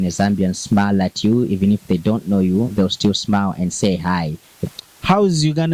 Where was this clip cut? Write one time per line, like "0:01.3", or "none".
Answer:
0:04.6